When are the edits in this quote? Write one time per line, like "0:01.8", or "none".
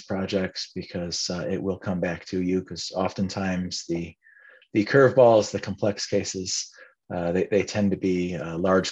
none